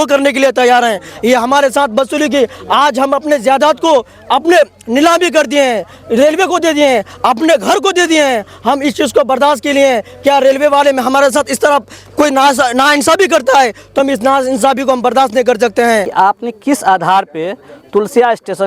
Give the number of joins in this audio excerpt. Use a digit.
1